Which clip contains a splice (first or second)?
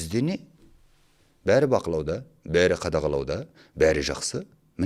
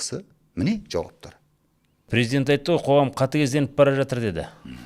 second